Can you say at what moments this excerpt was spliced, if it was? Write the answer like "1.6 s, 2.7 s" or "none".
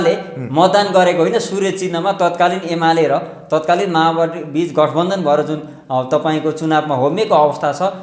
none